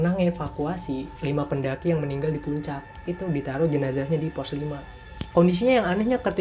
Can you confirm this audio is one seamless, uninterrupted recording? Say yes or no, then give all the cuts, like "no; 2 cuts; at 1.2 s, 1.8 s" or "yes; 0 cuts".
no; 3 cuts; at 1.1 s, 3.0 s, 5.1 s